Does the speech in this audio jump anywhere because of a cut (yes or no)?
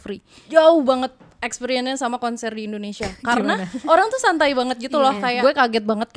yes